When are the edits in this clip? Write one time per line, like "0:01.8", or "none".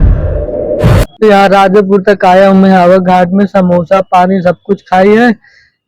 0:01.1